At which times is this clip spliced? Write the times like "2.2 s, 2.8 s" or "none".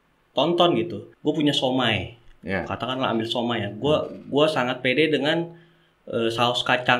1.0 s